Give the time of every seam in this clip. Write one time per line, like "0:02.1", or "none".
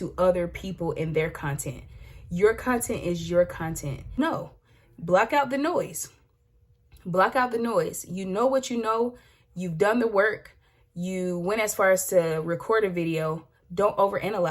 0:04.0